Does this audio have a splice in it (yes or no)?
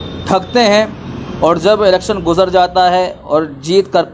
no